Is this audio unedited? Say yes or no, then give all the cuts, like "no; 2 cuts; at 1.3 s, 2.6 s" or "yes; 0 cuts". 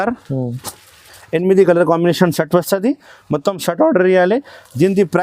no; 1 cut; at 1.1 s